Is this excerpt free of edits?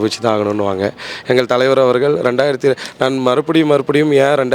yes; 0 cuts

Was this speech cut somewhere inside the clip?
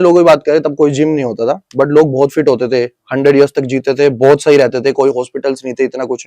no; 0 cuts

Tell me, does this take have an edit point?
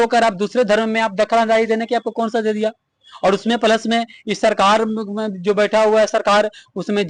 no; 0 cuts

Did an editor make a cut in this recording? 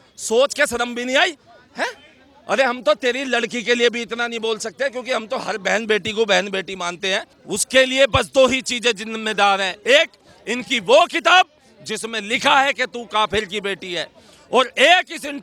yes; 1 cut; at 7.4 s

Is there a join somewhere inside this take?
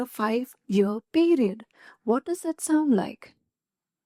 no; 0 cuts

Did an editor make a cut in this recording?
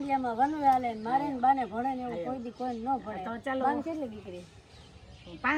no; 0 cuts

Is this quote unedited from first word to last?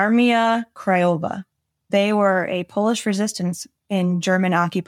no; 1 cut; at 1.9 s

